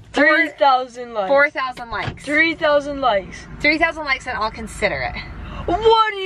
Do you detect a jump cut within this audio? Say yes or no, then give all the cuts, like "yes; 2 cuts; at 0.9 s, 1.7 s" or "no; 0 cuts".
no; 0 cuts